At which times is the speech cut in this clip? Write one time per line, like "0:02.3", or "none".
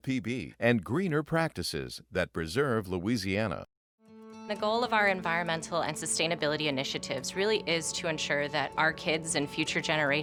none

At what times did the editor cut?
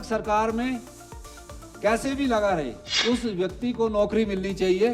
0:02.8

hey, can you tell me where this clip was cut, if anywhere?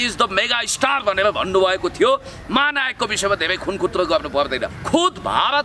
0:04.7

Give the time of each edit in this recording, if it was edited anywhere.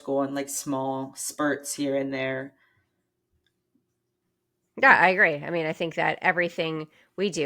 none

